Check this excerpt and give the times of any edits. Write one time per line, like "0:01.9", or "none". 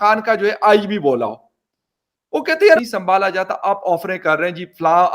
0:02.8